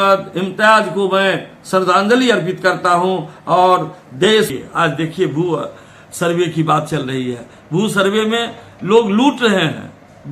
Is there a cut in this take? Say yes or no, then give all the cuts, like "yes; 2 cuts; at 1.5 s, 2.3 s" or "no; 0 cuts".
yes; 1 cut; at 4.5 s